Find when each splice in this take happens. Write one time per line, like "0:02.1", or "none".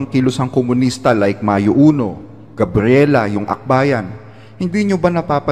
none